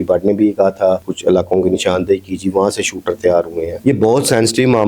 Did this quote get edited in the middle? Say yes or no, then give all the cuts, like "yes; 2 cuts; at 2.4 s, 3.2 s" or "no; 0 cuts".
yes; 2 cuts; at 1.0 s, 3.7 s